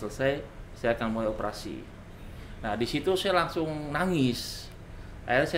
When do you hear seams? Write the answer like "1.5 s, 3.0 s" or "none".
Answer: none